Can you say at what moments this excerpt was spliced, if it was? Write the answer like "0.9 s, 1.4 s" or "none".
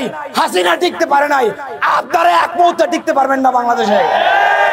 none

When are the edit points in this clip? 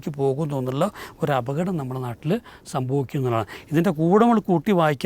none

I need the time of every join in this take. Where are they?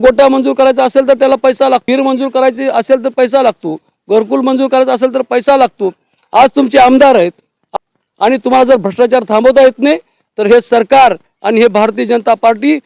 1.8 s, 7.6 s

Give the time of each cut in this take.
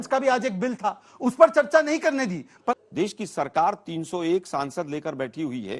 2.6 s

